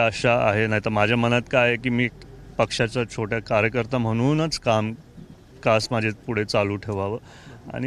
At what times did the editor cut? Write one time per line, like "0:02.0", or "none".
none